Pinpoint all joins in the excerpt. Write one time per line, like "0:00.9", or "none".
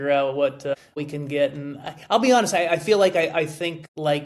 0:01.0
0:03.4